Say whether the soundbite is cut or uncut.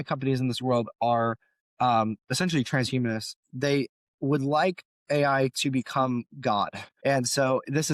uncut